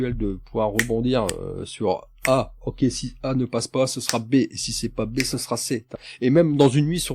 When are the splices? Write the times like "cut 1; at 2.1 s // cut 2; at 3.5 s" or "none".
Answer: cut 1; at 6.0 s